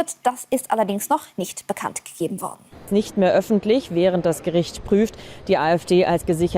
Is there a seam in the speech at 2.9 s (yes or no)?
yes